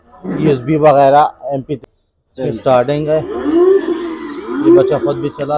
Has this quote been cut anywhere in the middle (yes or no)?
yes